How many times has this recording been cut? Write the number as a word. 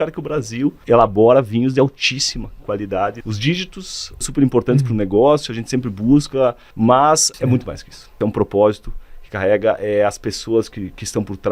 five